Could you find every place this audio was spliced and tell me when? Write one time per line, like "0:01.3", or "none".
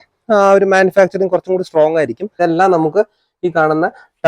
0:02.4